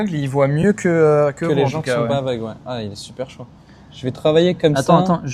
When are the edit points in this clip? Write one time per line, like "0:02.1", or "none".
none